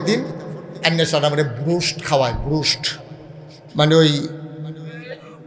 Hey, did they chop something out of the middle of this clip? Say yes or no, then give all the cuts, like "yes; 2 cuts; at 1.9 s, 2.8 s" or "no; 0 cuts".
no; 0 cuts